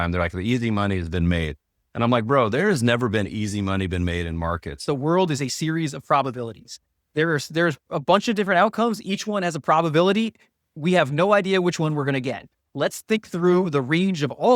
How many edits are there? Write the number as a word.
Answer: one